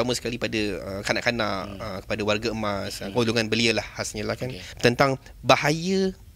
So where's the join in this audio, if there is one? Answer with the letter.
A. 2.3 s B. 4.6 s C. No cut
B